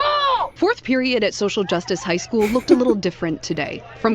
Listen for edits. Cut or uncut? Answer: cut